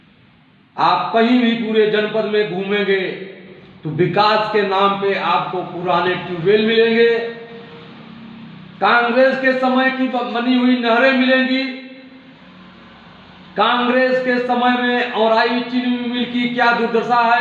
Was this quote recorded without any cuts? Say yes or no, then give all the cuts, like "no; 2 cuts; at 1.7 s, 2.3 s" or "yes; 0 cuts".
yes; 0 cuts